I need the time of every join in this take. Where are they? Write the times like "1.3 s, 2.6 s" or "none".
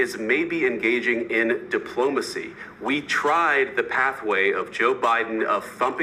none